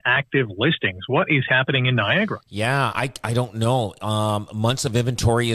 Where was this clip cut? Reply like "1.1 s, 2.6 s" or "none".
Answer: none